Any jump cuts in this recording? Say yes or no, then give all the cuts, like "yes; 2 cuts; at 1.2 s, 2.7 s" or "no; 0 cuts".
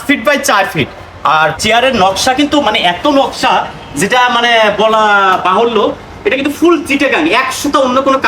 yes; 1 cut; at 1.6 s